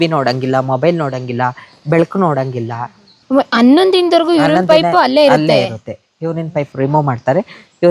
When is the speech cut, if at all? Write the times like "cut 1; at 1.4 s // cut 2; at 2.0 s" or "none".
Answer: cut 1; at 3.1 s